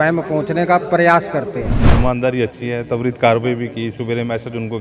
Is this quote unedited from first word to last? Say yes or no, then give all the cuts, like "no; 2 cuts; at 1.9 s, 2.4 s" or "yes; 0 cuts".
no; 1 cut; at 1.8 s